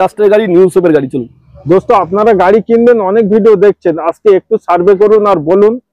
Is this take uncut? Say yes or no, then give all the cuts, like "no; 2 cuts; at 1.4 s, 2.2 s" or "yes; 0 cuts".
yes; 0 cuts